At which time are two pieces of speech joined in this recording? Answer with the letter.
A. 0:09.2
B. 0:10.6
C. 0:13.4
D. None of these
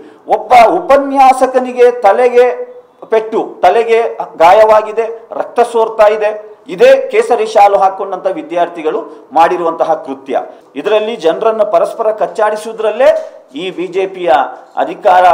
B